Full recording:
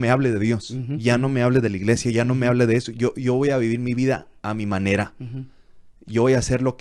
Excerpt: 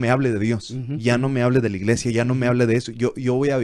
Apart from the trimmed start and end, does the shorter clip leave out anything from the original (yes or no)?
no